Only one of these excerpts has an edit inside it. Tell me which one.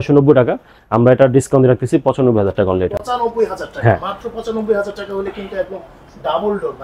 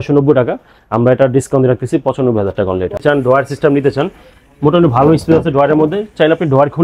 second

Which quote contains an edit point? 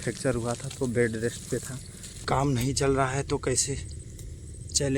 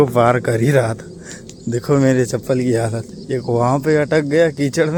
first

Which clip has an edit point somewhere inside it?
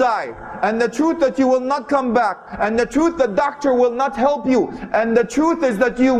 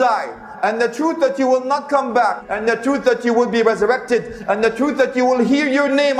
second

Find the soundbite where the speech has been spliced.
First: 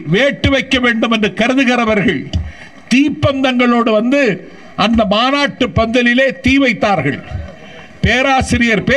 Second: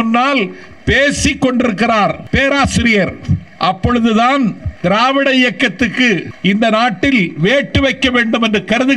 second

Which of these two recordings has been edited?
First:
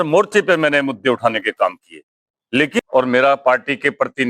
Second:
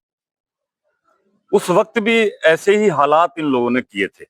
first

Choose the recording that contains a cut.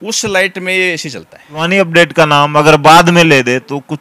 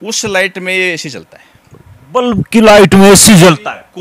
first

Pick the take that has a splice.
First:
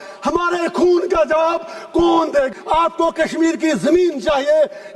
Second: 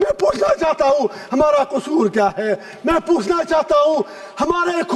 first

